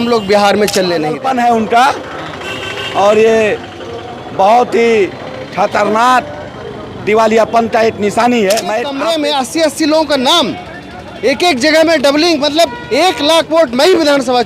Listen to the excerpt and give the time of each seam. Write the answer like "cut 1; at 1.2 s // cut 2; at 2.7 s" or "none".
cut 1; at 1.2 s // cut 2; at 9.0 s